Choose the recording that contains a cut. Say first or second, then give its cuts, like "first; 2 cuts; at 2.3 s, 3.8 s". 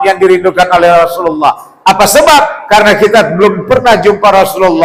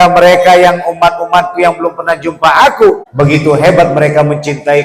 second; 1 cut; at 3.1 s